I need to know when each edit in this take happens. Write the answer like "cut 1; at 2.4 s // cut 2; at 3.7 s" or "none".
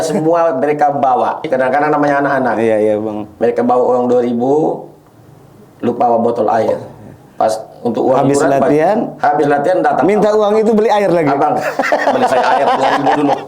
cut 1; at 1.5 s